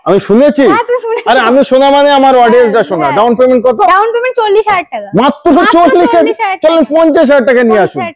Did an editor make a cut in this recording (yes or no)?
no